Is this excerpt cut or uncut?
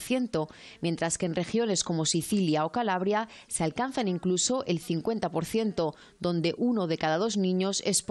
uncut